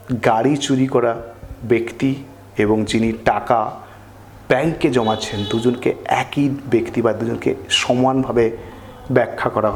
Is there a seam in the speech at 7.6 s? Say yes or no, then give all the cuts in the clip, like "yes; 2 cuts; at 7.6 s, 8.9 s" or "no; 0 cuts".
no; 0 cuts